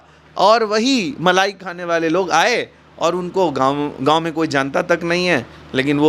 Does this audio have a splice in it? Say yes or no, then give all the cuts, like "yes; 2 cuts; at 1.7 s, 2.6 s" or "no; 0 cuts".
no; 0 cuts